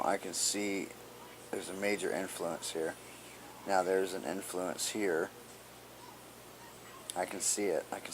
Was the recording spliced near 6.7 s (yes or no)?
yes